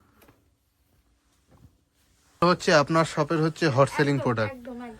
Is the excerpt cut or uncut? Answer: cut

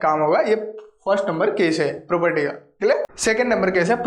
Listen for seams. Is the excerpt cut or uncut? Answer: cut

